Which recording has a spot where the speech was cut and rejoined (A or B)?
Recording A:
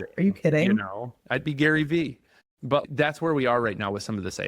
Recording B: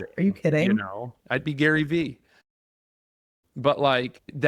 A